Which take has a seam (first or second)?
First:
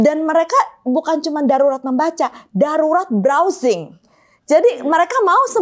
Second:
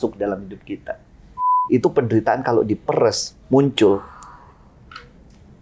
second